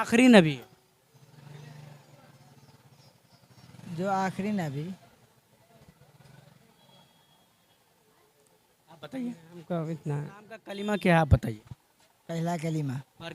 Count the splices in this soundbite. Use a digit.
1